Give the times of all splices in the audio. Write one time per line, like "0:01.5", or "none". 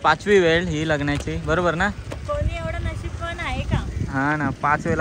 none

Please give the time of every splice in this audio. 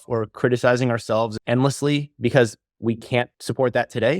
0:02.9

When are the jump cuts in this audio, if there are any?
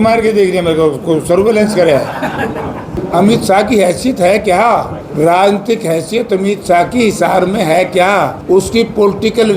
0:03.0
0:05.0
0:08.4

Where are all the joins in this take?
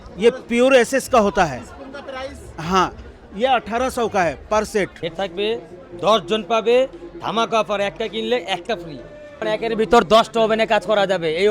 0:05.0
0:09.4

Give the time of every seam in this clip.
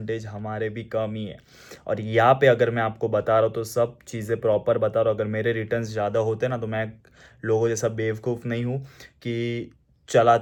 none

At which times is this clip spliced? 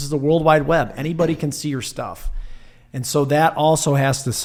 none

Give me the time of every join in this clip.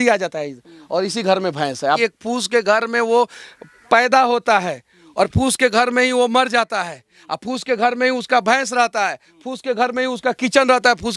0:02.0

